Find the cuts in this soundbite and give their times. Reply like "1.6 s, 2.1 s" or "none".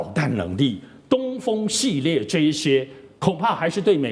none